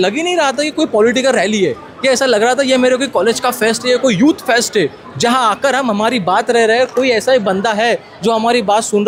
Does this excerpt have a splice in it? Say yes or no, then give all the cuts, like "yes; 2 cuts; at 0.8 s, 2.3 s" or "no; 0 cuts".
no; 0 cuts